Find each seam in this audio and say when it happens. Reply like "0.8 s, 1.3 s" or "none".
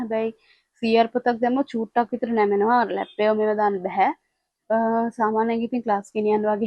none